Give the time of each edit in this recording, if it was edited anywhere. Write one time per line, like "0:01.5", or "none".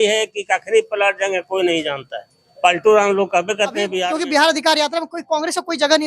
0:04.0